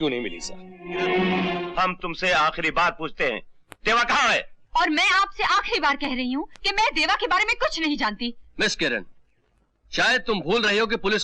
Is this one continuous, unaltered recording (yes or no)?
no